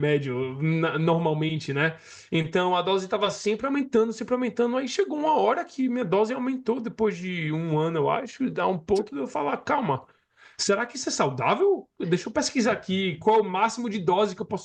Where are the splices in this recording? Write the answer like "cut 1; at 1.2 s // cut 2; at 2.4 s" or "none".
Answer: none